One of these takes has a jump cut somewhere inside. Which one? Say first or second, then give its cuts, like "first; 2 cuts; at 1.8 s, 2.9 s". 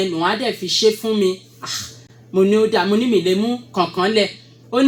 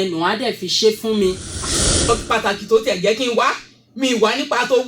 second; 1 cut; at 2.0 s